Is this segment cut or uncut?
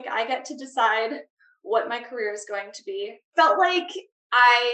cut